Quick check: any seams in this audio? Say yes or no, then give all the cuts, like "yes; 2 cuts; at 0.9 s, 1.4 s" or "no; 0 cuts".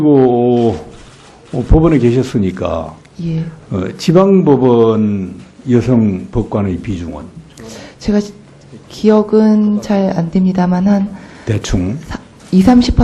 yes; 1 cut; at 12.1 s